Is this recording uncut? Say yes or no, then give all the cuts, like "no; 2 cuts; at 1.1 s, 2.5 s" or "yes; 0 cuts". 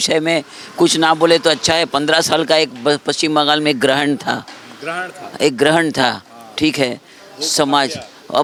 yes; 0 cuts